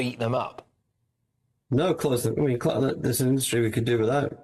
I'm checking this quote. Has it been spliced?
no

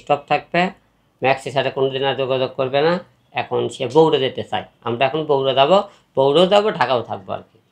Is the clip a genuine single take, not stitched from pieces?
yes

